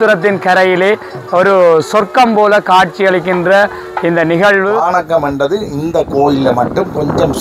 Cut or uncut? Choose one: cut